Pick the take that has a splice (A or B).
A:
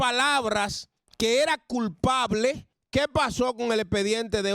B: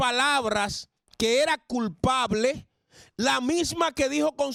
A